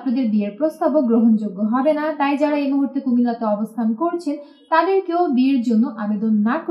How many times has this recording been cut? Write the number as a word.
zero